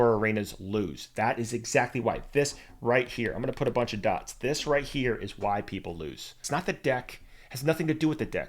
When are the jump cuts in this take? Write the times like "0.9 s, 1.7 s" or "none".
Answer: 6.3 s